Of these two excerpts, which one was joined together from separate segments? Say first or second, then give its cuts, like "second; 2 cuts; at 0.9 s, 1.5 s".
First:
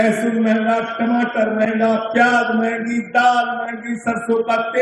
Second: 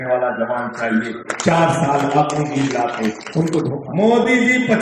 second; 1 cut; at 3.8 s